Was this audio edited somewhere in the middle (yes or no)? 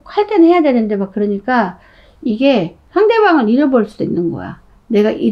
yes